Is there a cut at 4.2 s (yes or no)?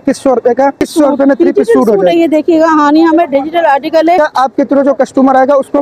yes